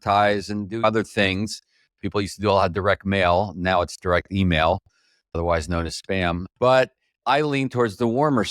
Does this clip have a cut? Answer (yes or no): yes